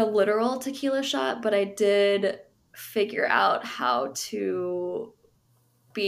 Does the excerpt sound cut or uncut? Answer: uncut